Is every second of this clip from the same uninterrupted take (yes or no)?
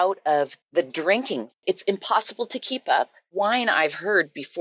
no